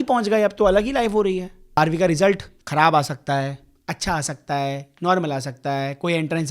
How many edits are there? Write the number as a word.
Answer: two